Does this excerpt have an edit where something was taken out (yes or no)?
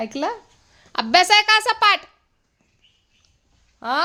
no